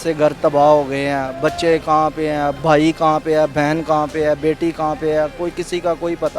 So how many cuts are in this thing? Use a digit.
1